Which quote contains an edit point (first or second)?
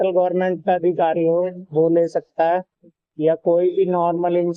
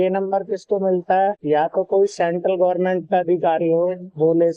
second